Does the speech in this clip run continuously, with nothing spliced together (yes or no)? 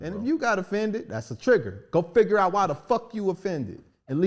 yes